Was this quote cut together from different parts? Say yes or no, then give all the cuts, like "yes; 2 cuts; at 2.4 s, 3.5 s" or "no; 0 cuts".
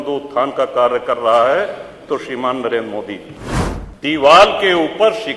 yes; 1 cut; at 3.3 s